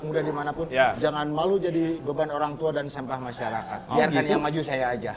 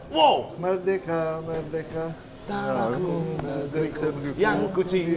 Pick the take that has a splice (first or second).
first